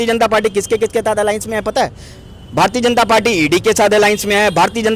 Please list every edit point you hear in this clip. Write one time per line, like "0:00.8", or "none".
none